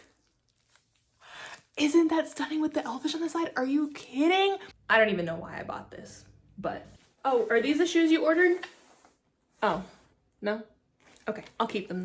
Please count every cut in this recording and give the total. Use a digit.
2